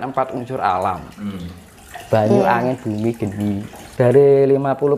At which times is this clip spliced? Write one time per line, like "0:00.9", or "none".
0:03.8